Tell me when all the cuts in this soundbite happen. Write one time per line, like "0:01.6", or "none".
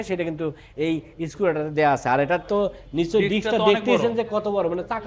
none